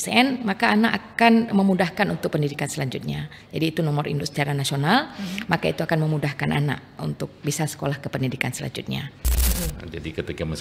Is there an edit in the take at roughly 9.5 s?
yes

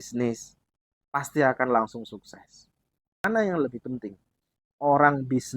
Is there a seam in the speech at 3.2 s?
yes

